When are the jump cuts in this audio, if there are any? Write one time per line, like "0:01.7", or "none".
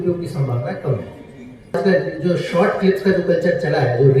0:01.8

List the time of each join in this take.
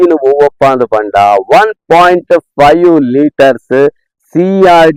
none

